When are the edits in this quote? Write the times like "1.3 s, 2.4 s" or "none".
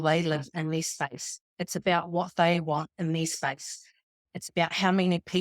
4.1 s